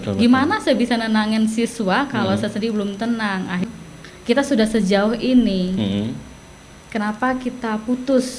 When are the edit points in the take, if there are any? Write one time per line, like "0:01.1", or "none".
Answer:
0:03.6